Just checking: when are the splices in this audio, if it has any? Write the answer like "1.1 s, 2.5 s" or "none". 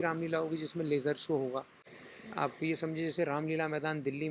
none